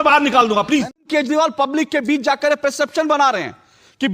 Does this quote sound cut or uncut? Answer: cut